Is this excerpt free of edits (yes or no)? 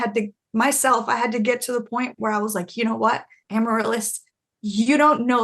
no